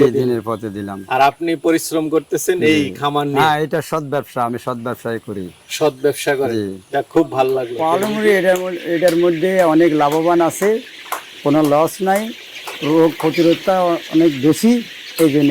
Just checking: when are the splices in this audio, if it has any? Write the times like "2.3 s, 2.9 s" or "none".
7.8 s